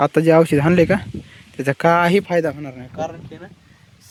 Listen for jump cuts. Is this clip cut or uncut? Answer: uncut